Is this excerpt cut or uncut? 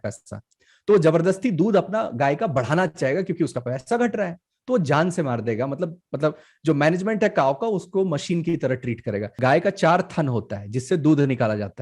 cut